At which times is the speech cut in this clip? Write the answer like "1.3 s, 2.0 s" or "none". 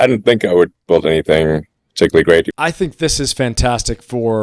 2.5 s